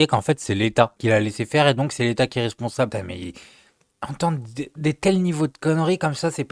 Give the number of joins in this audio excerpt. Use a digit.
1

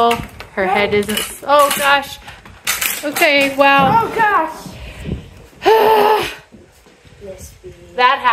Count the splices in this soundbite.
0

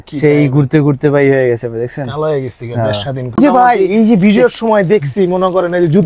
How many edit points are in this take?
1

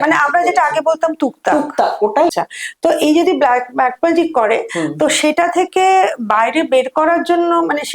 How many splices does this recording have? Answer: 1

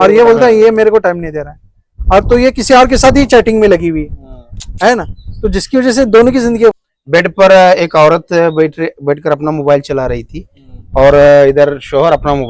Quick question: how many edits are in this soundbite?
1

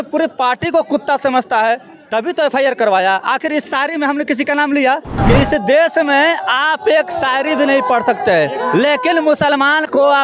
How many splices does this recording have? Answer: 1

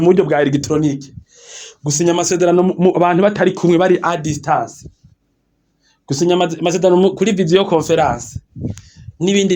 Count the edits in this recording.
0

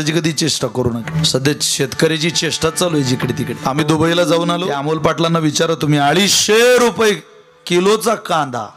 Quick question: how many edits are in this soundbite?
3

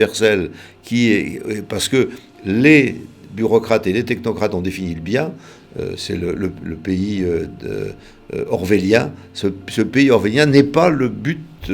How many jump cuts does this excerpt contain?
1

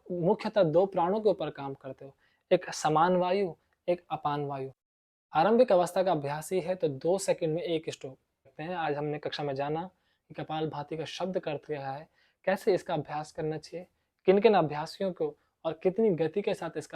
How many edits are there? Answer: 2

